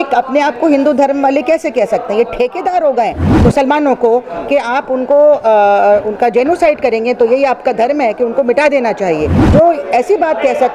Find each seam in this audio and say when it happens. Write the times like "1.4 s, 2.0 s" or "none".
3.2 s, 9.4 s